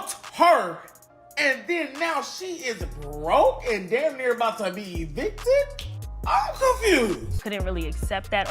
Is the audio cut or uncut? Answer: cut